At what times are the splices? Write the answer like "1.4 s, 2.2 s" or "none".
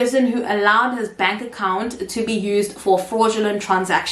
none